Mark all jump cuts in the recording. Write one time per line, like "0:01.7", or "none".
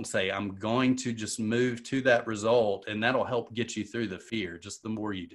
0:04.2